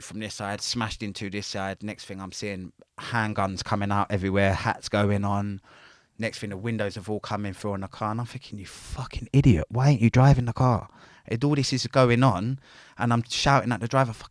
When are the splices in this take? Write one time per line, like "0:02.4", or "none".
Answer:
none